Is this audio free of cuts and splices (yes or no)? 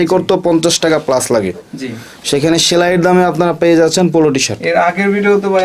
yes